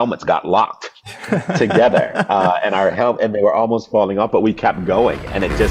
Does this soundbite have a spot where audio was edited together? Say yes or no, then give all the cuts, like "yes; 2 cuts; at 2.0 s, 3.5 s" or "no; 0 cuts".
no; 0 cuts